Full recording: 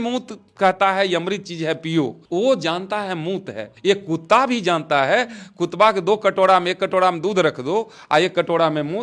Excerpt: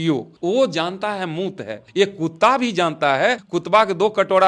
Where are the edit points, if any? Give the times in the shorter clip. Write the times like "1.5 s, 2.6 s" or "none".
3.5 s

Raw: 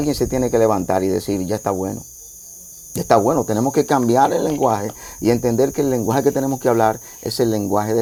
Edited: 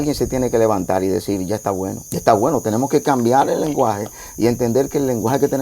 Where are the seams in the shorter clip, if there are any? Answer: 2.0 s

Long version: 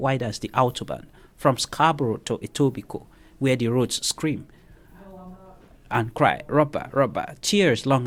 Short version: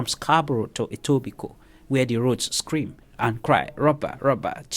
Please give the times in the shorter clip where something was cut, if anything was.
3.0 s

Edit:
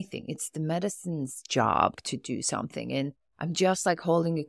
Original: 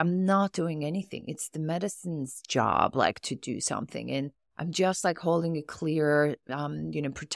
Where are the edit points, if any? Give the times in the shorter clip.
1.9 s

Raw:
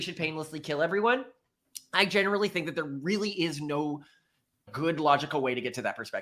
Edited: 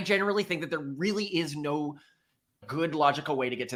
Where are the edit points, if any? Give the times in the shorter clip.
none

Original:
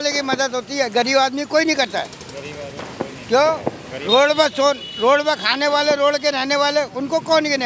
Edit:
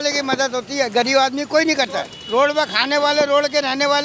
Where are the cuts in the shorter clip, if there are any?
2.2 s

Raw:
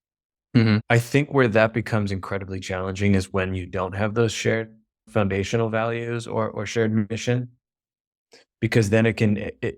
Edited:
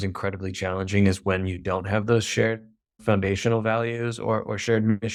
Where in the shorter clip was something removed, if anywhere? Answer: none

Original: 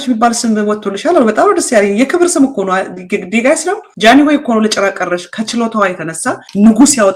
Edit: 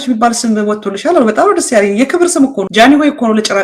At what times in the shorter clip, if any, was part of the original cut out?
2.6 s

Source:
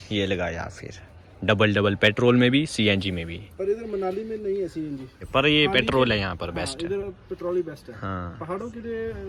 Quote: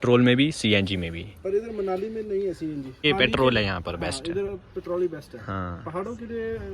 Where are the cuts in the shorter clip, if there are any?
3.0 s

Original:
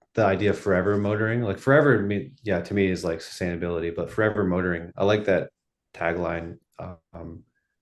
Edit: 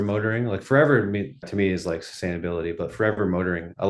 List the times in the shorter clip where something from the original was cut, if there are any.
1.5 s

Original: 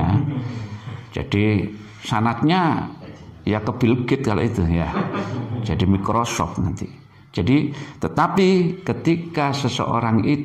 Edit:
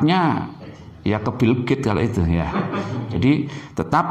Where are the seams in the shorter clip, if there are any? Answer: 3.0 s

